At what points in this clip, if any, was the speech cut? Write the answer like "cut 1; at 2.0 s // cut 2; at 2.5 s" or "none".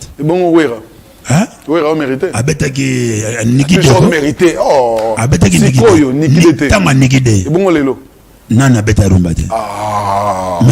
none